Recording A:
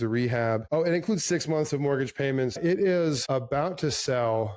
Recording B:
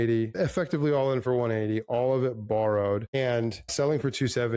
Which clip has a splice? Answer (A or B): A